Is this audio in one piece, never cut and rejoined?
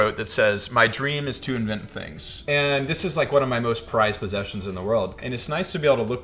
no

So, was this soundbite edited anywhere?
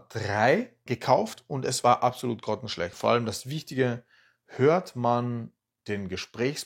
yes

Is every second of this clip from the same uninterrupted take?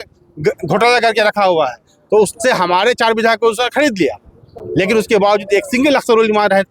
yes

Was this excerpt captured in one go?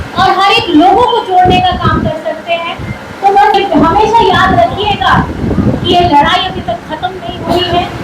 no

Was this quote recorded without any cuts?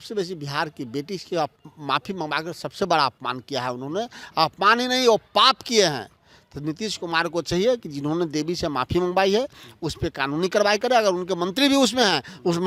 yes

